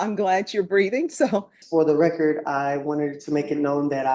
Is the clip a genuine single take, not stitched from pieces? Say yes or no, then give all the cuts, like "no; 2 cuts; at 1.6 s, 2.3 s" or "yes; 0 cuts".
no; 1 cut; at 1.6 s